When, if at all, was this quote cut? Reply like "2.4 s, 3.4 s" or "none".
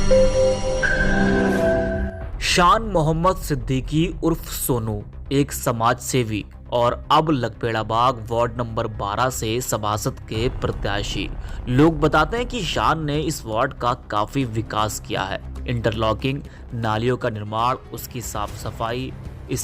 2.0 s